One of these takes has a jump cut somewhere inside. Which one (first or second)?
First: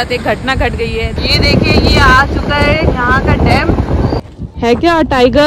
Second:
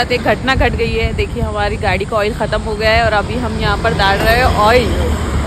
first